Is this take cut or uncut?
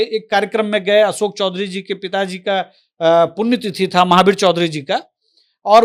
uncut